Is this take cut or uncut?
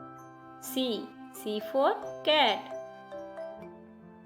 cut